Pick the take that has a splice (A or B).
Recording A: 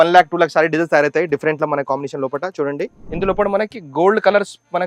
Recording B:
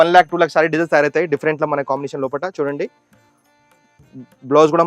A